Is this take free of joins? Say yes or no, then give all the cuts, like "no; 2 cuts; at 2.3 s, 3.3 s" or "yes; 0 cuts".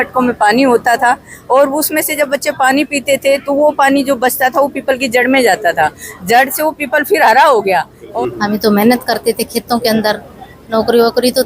no; 1 cut; at 8.1 s